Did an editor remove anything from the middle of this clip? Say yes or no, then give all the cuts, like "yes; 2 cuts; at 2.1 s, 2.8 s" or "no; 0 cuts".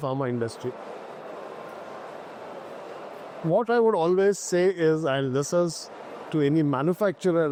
no; 0 cuts